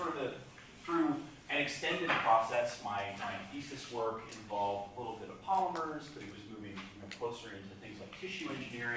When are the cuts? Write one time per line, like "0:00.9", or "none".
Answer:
none

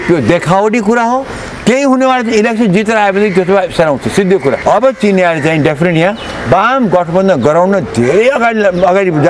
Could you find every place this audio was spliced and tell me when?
0:04.6

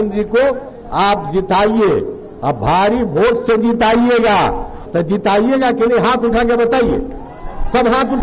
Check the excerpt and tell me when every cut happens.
0:04.8

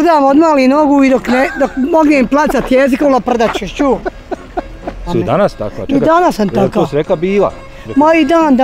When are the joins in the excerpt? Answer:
0:05.1

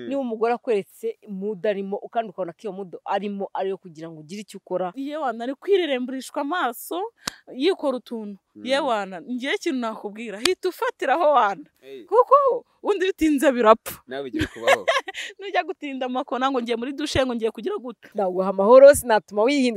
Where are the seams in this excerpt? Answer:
0:04.9
0:18.1

